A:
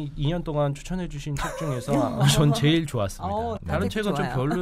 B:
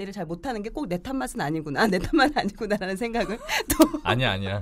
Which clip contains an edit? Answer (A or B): A